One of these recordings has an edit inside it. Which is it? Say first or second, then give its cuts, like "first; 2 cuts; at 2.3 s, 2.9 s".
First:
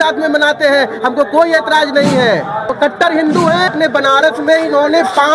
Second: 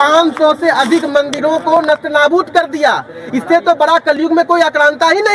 first; 2 cuts; at 2.7 s, 3.7 s